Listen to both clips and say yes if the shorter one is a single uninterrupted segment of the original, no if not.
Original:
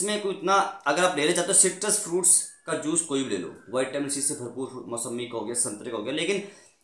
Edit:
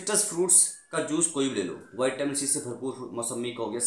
yes